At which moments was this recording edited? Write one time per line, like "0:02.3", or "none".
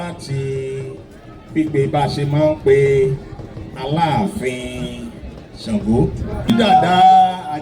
0:06.5